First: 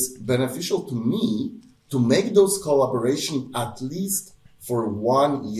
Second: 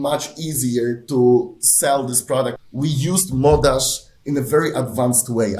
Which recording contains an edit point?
second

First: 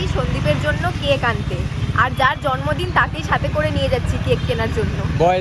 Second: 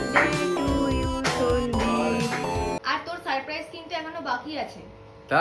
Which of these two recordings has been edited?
second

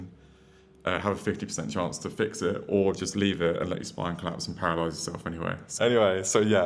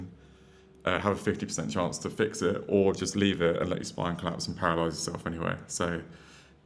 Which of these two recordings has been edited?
first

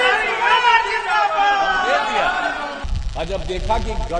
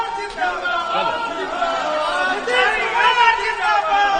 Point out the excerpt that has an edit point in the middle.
first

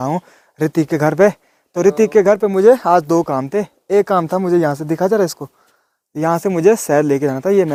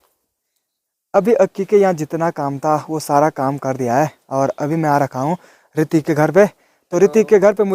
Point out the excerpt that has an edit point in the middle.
second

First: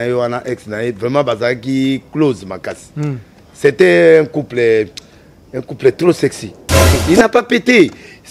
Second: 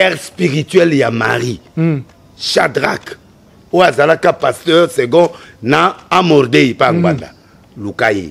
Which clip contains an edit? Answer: first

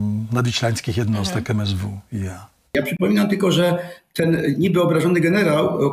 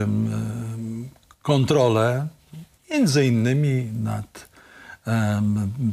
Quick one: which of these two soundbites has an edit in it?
first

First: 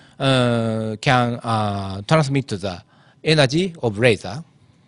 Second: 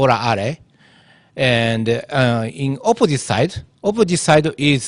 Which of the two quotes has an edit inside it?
second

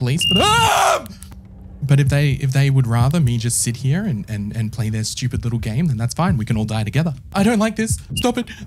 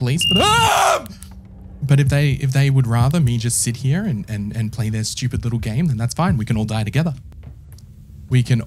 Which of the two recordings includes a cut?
first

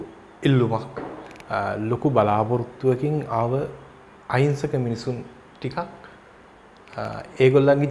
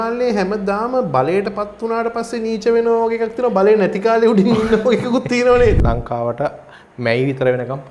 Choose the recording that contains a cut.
second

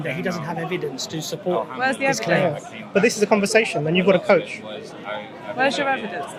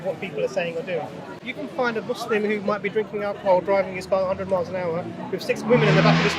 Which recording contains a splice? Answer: second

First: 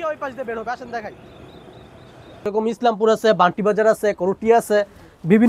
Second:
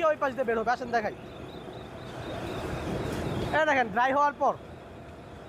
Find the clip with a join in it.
first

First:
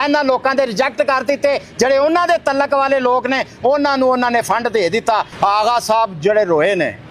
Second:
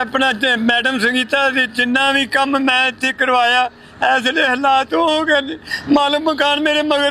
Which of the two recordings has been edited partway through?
first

